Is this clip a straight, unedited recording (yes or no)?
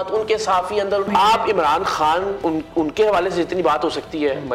no